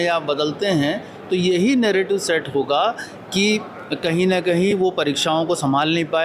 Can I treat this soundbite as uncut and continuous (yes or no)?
yes